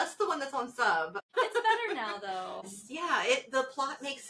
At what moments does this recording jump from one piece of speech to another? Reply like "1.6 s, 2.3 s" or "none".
1.3 s